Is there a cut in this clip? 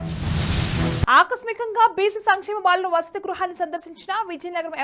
no; 0 cuts

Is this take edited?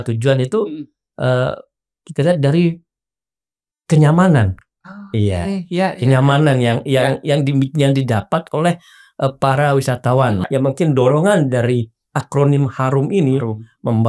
yes; 1 cut; at 10.5 s

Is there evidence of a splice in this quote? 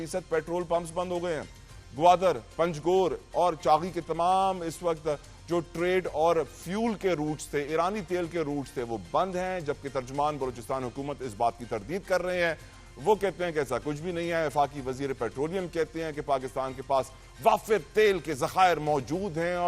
no; 0 cuts

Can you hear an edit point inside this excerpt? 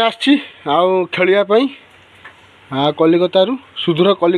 no; 0 cuts

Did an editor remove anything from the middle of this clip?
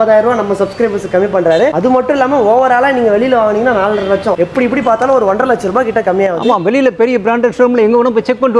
no; 0 cuts

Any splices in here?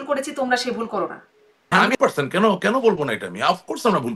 yes; 1 cut; at 1.8 s

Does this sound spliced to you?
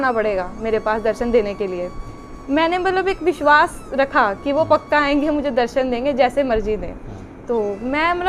no; 0 cuts

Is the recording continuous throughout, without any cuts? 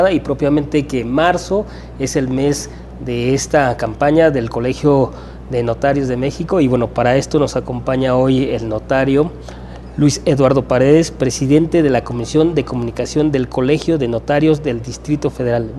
no; 1 cut; at 12.0 s

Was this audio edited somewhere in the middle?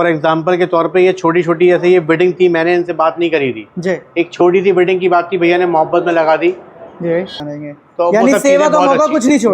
yes; 1 cut; at 7.4 s

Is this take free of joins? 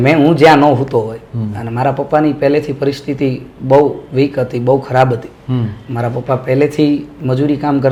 yes; 0 cuts

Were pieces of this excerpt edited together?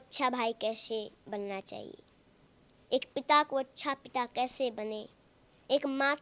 no; 0 cuts

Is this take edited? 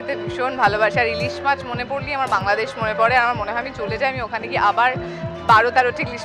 no; 0 cuts

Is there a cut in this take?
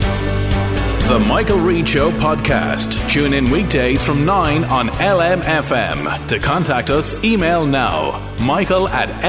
no; 0 cuts

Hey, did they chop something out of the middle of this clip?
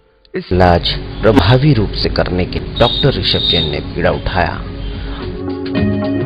no; 0 cuts

